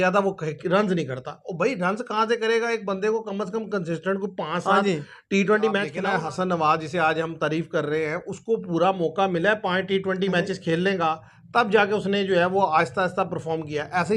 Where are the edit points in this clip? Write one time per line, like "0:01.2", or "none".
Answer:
0:06.1